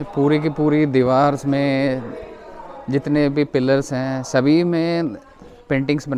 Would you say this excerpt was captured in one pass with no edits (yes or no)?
yes